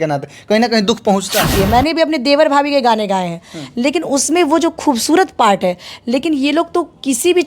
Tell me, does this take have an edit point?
yes; 1 cut; at 1.5 s

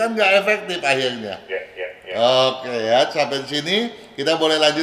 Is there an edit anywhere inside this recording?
no; 0 cuts

